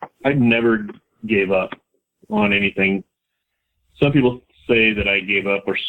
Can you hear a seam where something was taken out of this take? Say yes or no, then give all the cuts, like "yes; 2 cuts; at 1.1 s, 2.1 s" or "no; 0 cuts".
no; 0 cuts